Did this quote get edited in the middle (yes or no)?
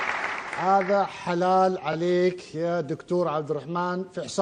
no